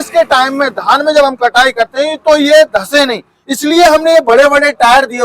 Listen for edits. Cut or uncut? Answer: uncut